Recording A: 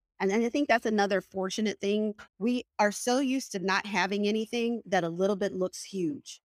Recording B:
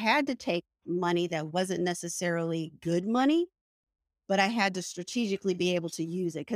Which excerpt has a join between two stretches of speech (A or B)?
A